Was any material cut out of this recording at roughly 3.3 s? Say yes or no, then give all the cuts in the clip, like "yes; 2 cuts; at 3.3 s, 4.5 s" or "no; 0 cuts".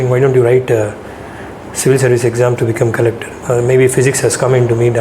yes; 1 cut; at 3.3 s